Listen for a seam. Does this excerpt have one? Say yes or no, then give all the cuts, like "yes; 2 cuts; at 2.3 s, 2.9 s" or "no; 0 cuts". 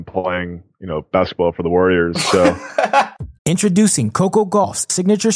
yes; 1 cut; at 3.1 s